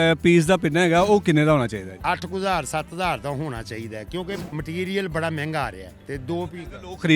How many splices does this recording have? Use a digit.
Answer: 2